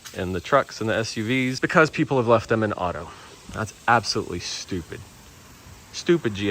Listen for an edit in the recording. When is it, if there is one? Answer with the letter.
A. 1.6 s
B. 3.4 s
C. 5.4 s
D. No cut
A